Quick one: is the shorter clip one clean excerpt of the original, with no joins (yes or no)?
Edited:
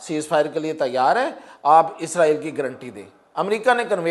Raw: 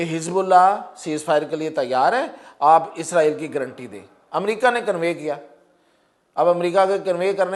yes